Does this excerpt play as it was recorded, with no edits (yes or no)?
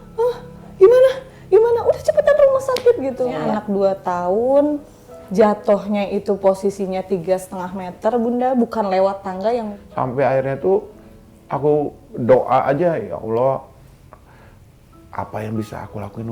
no